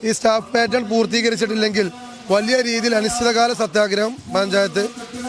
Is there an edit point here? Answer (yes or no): no